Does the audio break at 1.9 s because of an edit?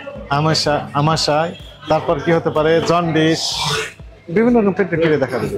no; 0 cuts

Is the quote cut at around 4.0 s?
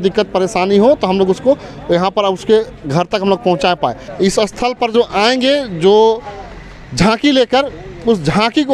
yes; 1 cut; at 4.0 s

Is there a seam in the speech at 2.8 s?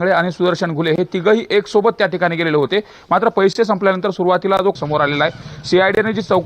no; 1 cut; at 4.8 s

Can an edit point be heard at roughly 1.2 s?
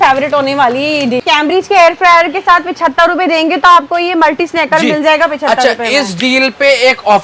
yes; 1 cut; at 1.2 s

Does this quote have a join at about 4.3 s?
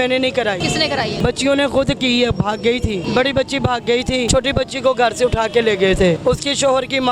yes; 4 cuts; at 1.2 s, 3.0 s, 4.3 s, 6.2 s

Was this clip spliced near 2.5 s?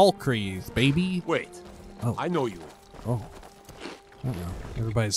no; 1 cut; at 1.2 s

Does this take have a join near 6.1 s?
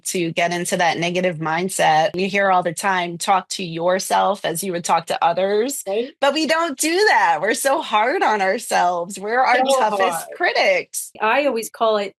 no; 2 cuts; at 2.1 s, 11.1 s

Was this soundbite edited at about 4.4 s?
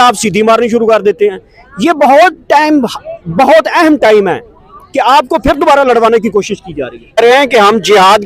no; 1 cut; at 7.2 s

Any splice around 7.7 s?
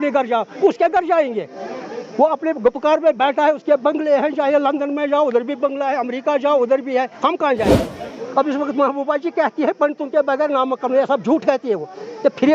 yes; 1 cut; at 7.7 s

